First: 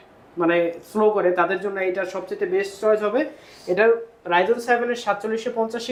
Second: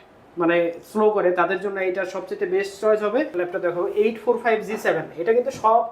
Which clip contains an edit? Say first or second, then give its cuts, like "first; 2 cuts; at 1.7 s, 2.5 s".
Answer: second; 1 cut; at 3.4 s